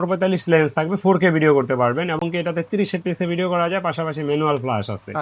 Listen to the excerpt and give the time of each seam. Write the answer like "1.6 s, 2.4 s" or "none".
none